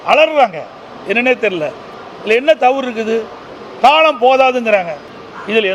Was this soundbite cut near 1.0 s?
no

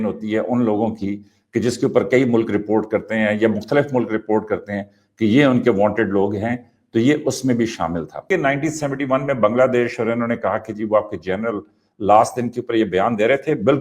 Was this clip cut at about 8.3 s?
yes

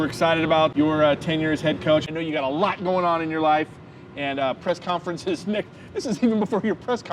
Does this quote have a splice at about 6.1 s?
no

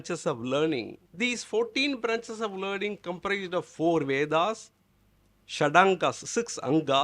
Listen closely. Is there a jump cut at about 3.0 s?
no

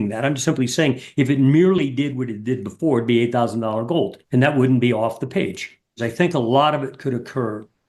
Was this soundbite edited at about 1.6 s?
no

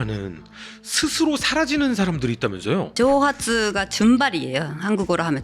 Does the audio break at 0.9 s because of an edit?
no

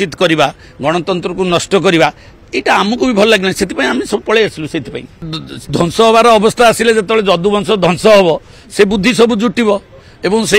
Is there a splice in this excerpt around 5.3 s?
yes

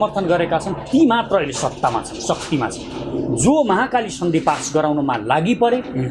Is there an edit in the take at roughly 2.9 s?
no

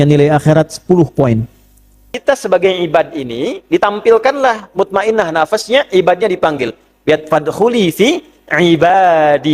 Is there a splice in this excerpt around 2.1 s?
yes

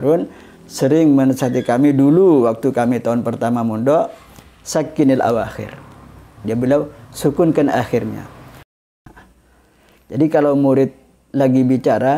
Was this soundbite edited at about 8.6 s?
yes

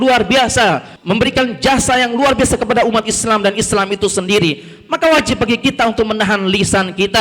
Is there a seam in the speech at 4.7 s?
no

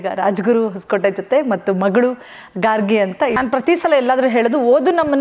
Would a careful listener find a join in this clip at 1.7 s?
no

